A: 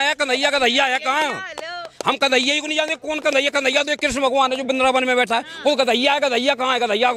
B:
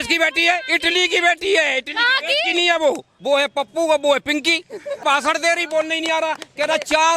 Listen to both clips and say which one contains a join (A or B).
B